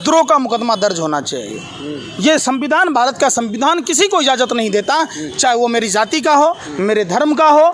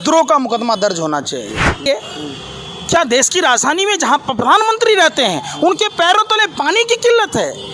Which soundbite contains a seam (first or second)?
second